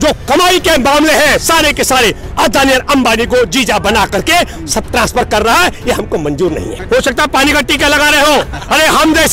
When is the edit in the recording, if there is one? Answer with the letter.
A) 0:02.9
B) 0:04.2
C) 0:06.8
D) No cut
C